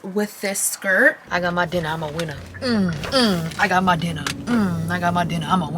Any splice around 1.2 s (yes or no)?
yes